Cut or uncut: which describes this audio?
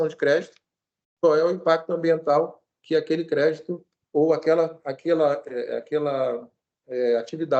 uncut